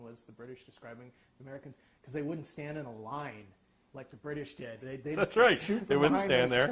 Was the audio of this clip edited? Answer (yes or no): no